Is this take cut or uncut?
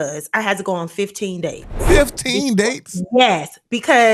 uncut